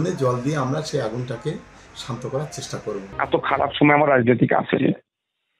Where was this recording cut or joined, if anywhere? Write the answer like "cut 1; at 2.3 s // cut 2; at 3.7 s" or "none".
cut 1; at 3.1 s